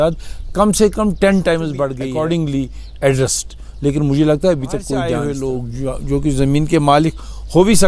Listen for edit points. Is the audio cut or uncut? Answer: cut